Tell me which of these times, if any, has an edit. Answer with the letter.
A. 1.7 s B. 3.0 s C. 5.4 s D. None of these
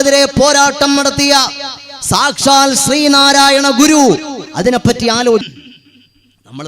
C